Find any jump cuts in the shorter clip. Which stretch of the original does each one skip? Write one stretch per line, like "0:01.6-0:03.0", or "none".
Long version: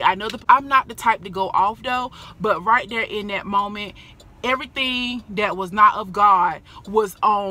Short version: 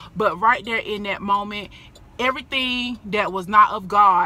none